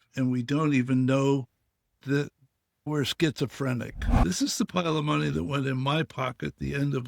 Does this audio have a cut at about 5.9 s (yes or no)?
no